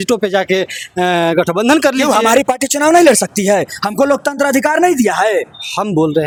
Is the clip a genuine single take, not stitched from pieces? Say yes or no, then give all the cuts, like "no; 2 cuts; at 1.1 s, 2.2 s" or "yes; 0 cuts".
yes; 0 cuts